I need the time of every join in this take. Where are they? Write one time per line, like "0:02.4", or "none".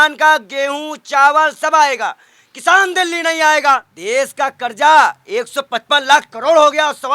0:03.9